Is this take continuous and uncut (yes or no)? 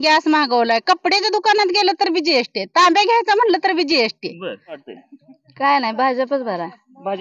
no